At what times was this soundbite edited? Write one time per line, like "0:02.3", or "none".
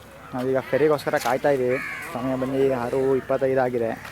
none